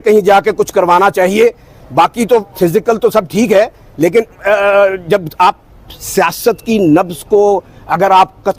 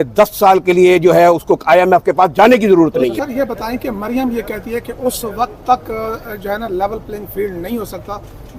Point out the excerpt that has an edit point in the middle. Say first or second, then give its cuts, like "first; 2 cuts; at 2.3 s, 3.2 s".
second; 1 cut; at 3.1 s